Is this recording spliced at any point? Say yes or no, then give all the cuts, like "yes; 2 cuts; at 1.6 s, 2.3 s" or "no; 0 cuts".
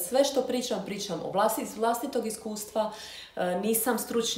no; 0 cuts